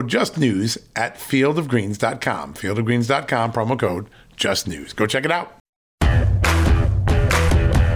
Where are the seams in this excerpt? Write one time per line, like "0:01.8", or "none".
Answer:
0:06.0